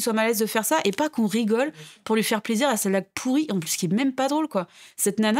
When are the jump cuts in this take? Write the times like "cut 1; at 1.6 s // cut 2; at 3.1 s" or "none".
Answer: none